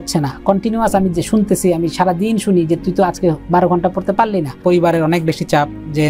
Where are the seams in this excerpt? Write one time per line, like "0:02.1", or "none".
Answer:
0:04.6